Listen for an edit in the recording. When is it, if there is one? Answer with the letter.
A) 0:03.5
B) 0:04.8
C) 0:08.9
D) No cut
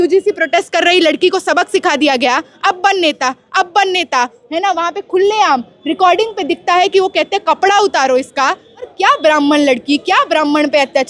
C